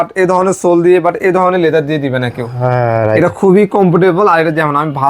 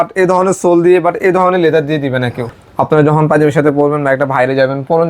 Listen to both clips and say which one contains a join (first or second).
second